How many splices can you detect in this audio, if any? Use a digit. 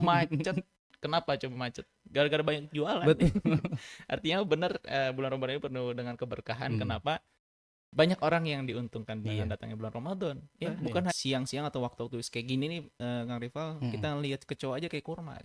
1